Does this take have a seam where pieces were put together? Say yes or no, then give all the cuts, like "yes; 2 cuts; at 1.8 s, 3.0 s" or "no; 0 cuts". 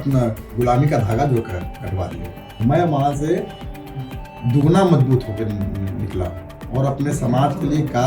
yes; 1 cut; at 2.6 s